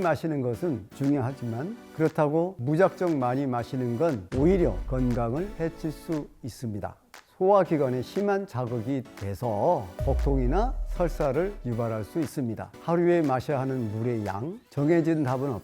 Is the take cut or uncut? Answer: cut